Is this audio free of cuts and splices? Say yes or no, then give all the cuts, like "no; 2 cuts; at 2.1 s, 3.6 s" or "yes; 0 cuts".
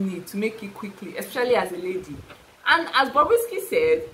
yes; 0 cuts